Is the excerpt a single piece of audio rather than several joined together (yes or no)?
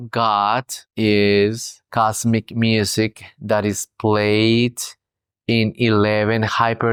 yes